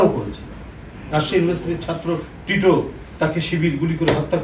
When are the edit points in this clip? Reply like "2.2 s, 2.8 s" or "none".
3.0 s